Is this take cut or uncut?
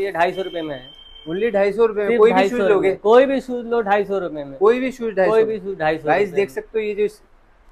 uncut